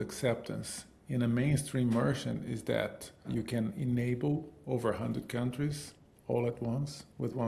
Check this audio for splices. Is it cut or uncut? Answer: cut